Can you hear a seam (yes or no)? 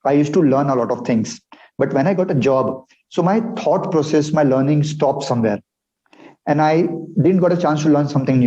no